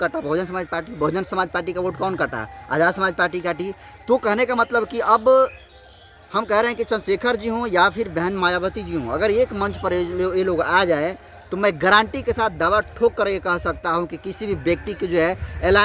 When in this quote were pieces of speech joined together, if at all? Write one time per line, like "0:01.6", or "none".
none